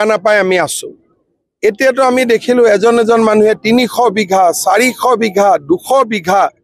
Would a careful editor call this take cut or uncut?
uncut